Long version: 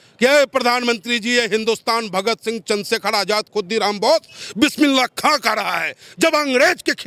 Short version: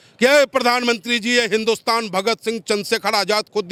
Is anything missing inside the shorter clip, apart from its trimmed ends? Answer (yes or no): no